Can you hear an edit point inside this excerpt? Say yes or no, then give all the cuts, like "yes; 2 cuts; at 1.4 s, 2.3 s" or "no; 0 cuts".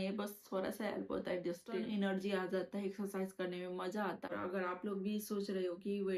yes; 2 cuts; at 1.7 s, 4.3 s